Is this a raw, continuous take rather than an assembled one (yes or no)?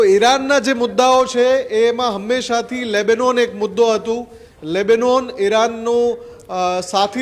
yes